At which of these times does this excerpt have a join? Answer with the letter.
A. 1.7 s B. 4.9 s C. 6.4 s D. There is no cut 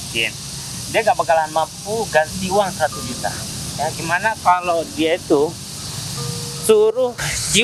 D